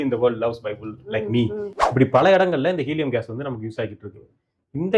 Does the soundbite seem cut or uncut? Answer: cut